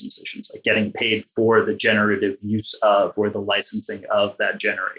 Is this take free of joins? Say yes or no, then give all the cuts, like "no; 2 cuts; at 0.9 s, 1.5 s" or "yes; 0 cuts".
yes; 0 cuts